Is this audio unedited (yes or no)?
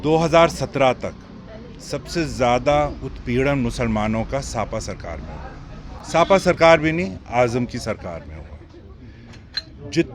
yes